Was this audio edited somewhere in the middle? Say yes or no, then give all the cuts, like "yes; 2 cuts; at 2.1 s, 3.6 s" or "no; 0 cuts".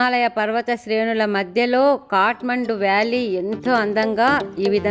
no; 0 cuts